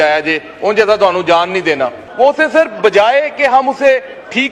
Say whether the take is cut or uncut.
cut